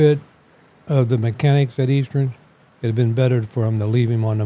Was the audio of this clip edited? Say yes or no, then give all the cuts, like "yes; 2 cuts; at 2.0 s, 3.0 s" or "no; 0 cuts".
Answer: no; 0 cuts